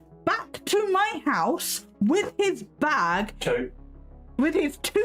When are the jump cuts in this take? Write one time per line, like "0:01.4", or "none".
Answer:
none